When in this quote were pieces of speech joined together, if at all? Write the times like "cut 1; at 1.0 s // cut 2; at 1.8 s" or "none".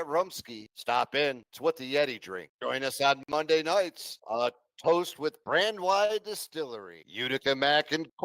cut 1; at 5.1 s